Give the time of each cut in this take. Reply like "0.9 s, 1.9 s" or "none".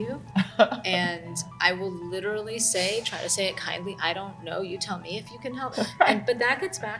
5.7 s